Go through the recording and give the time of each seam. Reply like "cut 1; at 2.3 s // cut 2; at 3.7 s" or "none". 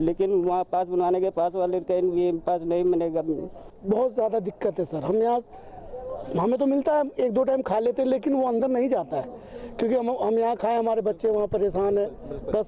cut 1; at 3.7 s